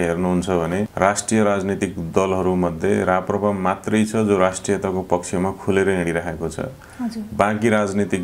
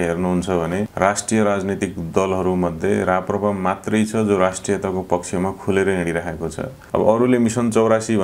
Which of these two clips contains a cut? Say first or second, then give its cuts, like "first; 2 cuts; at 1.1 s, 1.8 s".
second; 1 cut; at 6.8 s